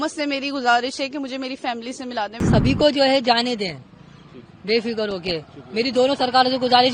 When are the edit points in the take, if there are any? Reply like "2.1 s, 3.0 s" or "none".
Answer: 2.4 s